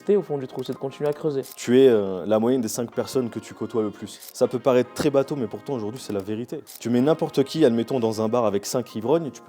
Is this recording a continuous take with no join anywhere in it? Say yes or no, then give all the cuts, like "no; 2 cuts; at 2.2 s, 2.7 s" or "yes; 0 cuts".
no; 2 cuts; at 1.5 s, 6.7 s